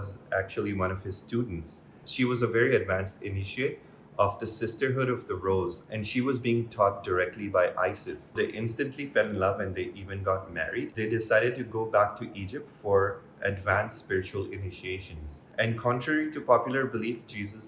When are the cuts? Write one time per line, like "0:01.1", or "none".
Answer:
0:08.3
0:10.9